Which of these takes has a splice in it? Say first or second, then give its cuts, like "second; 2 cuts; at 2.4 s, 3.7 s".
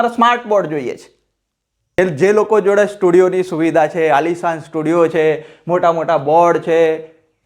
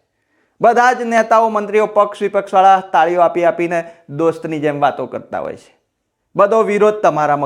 first; 1 cut; at 2.0 s